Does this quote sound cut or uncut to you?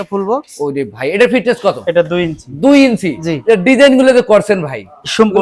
uncut